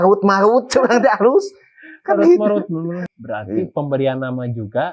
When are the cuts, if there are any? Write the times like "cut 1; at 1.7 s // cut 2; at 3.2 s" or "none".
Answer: cut 1; at 3.1 s